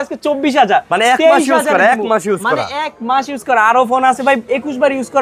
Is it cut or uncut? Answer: uncut